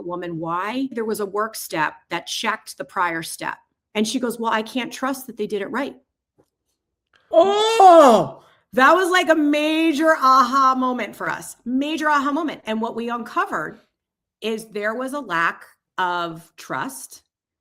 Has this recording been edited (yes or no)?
yes